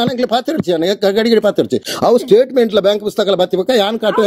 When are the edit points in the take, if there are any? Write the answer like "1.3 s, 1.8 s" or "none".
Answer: none